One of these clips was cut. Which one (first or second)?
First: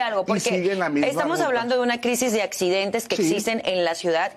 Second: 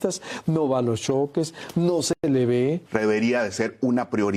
second